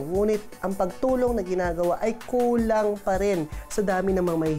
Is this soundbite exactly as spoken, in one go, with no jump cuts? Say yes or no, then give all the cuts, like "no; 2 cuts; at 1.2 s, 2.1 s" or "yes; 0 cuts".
yes; 0 cuts